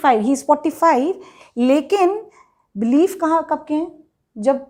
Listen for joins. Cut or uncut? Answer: uncut